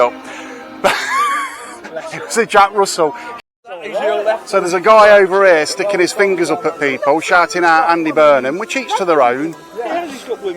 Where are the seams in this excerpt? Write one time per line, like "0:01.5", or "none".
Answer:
0:03.3